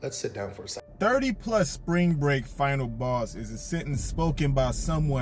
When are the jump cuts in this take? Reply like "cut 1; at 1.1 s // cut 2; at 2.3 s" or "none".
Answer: cut 1; at 1.0 s